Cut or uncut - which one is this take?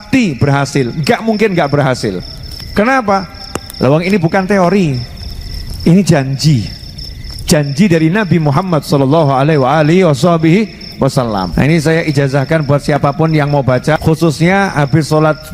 cut